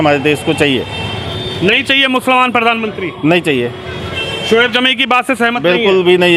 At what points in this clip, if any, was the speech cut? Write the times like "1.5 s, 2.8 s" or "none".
none